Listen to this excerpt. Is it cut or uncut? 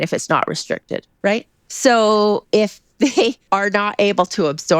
cut